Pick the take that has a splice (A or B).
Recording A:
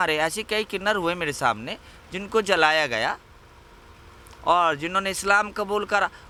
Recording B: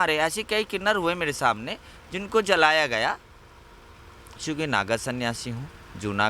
B